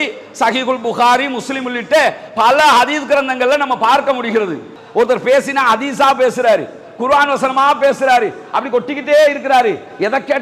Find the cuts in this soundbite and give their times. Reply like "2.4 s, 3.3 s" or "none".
4.7 s